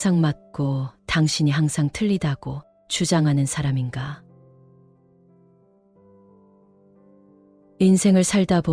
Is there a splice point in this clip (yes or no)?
yes